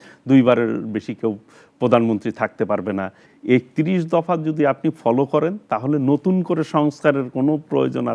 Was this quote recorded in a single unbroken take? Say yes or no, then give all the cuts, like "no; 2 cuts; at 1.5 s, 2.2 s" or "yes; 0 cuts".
no; 1 cut; at 3.2 s